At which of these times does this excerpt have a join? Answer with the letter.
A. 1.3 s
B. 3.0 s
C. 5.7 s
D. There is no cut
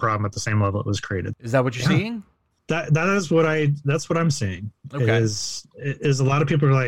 A